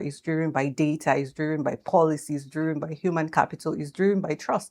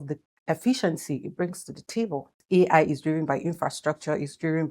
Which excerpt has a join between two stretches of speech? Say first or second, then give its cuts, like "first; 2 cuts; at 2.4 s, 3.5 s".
second; 1 cut; at 2.4 s